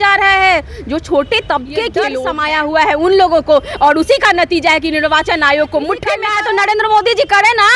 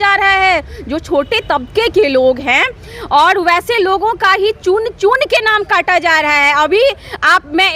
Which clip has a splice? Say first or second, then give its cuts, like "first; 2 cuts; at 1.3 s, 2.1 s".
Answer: first; 2 cuts; at 2.2 s, 6.3 s